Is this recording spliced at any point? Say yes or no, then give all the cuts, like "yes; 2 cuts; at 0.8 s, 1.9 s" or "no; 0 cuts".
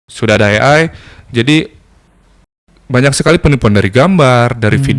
no; 0 cuts